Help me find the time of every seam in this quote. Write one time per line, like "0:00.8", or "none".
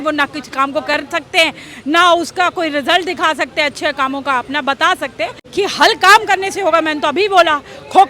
0:05.4